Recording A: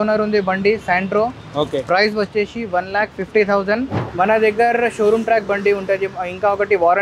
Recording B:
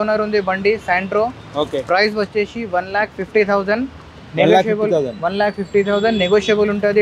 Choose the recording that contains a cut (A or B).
A